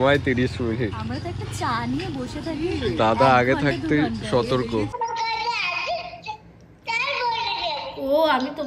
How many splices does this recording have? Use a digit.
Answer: 1